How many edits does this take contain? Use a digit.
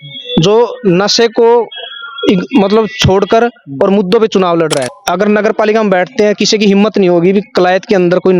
1